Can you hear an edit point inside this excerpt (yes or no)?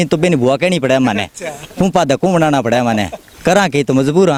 no